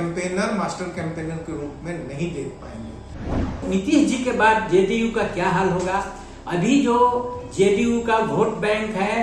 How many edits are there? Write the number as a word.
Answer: one